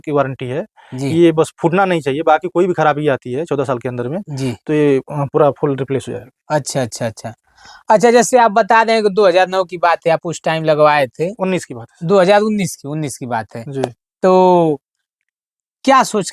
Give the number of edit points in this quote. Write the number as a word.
zero